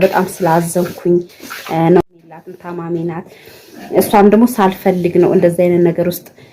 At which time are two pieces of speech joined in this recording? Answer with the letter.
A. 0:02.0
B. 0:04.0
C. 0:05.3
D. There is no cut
A